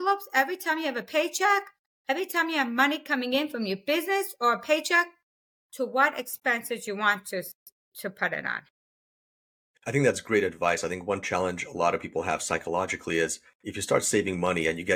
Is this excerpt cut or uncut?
uncut